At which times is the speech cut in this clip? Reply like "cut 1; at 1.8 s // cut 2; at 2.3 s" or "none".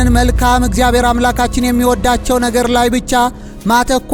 none